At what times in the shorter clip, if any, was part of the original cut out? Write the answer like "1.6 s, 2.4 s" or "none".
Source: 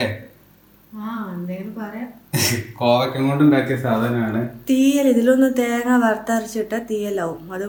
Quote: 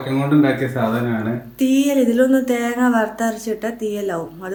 none

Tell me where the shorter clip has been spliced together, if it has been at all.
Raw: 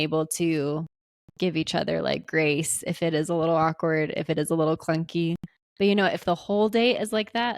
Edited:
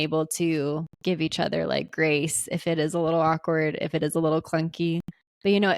0.9 s

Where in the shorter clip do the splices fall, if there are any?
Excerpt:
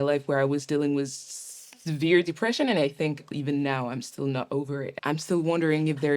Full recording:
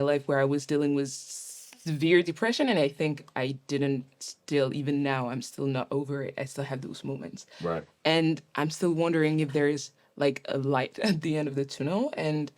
3.3 s, 4.9 s

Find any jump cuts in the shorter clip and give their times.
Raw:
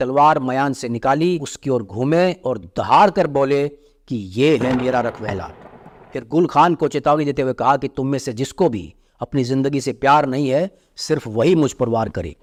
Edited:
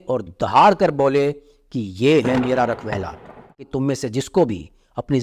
3.7 s

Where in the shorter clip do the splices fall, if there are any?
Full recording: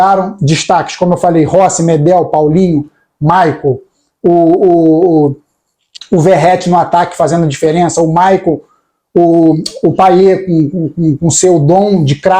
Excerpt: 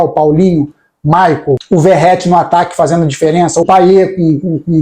1.6 s, 3.6 s

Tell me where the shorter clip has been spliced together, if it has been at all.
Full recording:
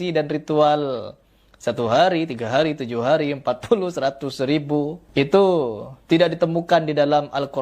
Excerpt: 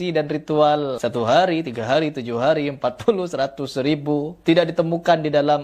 1.0 s, 4.3 s

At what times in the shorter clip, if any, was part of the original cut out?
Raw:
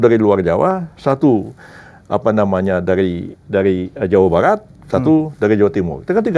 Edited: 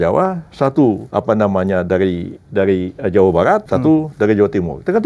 1.0 s, 3.7 s

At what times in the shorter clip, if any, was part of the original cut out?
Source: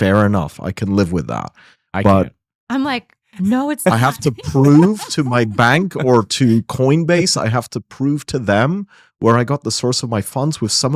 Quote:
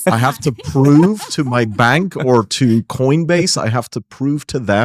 none

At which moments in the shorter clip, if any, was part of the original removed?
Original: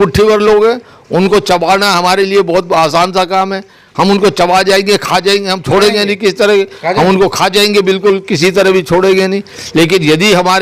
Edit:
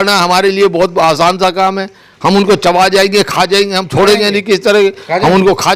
none

